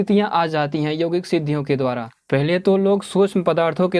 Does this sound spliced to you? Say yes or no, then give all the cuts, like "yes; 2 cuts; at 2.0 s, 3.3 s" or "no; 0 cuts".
yes; 1 cut; at 2.1 s